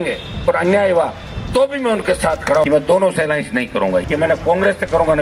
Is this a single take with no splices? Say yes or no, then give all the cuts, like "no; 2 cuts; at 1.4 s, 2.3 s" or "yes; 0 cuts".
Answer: no; 2 cuts; at 2.7 s, 4.0 s